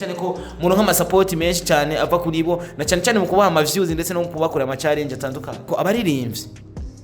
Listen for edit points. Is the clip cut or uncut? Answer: cut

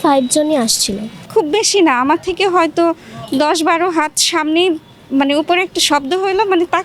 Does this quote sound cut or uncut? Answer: cut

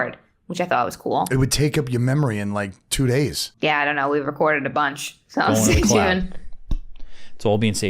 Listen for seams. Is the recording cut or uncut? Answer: cut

